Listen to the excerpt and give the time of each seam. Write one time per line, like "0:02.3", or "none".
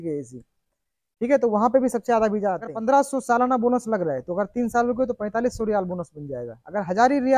0:02.8